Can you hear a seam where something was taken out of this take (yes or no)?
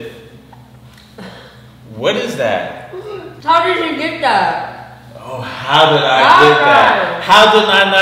yes